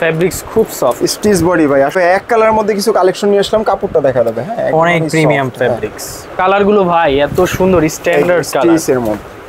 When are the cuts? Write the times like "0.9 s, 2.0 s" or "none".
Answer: 1.9 s, 6.3 s